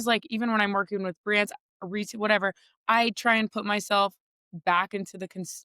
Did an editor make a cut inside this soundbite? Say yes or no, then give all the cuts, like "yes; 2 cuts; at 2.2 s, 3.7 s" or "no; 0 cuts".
no; 0 cuts